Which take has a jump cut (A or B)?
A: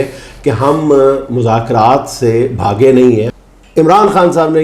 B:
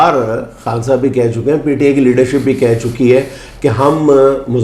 A